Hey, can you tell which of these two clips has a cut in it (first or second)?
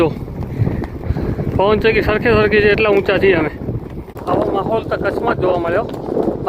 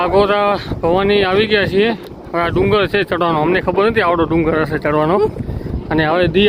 first